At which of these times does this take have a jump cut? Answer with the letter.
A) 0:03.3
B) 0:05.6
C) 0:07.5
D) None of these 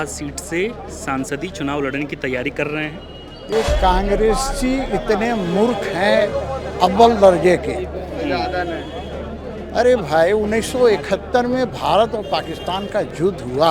A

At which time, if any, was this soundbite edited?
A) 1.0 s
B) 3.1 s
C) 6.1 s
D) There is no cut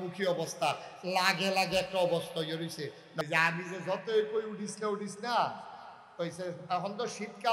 B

